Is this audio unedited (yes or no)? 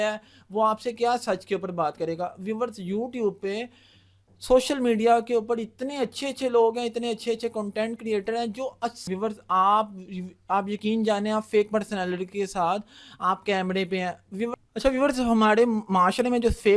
no